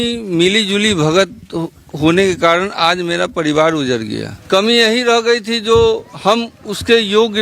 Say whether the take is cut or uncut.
cut